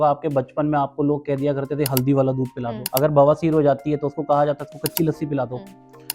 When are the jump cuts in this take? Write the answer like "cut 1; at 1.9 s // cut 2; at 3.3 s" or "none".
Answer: cut 1; at 2.8 s